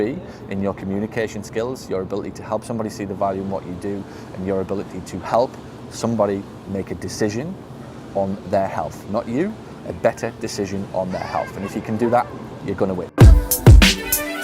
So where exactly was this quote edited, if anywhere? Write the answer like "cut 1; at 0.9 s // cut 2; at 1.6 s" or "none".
cut 1; at 13.1 s